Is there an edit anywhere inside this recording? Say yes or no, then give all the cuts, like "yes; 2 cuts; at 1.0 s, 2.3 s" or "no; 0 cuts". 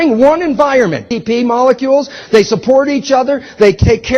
no; 0 cuts